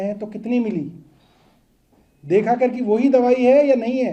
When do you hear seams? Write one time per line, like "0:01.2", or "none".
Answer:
none